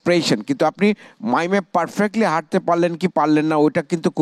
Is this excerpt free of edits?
yes; 0 cuts

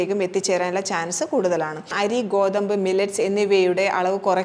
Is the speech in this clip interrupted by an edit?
yes; 1 cut; at 1.9 s

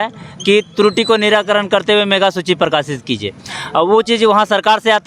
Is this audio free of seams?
yes; 0 cuts

